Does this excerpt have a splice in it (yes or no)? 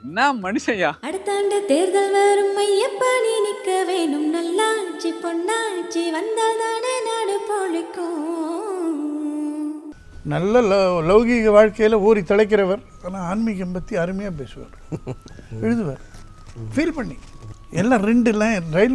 yes